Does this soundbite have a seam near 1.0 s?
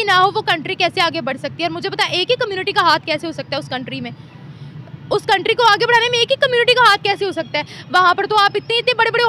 no; 0 cuts

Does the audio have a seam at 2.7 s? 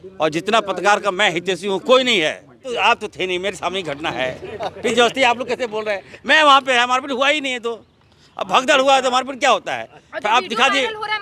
yes; 1 cut; at 2.7 s

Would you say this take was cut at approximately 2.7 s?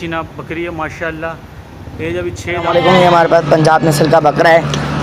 yes; 1 cut; at 2.7 s

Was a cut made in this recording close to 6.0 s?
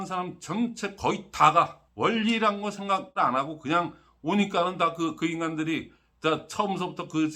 no; 2 cuts; at 1.8 s, 3.1 s

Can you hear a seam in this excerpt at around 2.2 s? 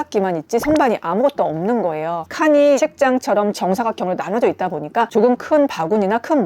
yes; 1 cut; at 2.2 s

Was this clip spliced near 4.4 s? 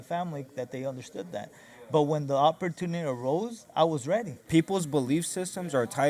yes; 1 cut; at 4.4 s

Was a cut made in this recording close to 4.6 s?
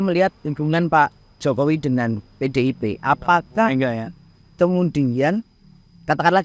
no; 0 cuts

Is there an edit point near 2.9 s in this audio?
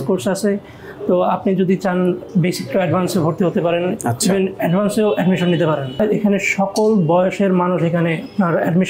no; 1 cut; at 6.0 s

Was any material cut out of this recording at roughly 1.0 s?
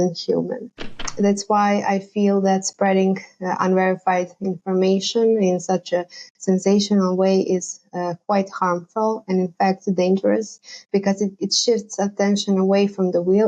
yes; 1 cut; at 1.0 s

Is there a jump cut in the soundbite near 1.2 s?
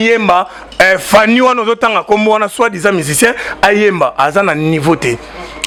no; 0 cuts

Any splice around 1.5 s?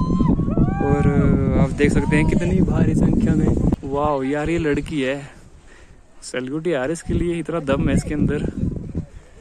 no; 1 cut; at 3.7 s

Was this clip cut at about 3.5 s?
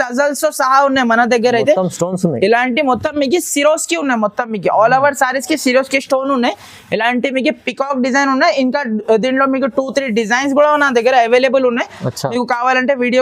no; 0 cuts

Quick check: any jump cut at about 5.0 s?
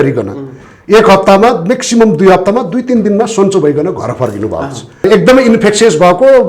yes; 1 cut; at 5.0 s

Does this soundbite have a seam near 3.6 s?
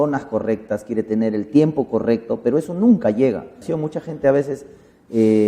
yes; 1 cut; at 3.6 s

